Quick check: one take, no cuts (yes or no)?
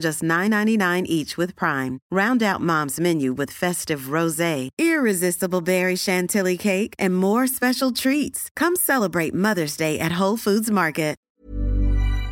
no